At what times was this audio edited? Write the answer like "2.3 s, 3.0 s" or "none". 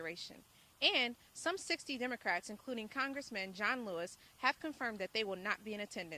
none